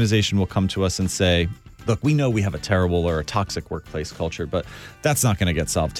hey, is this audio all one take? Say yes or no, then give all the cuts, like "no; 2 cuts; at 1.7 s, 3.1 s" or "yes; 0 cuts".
yes; 0 cuts